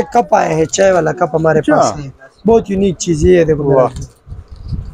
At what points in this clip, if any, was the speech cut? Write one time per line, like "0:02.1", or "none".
none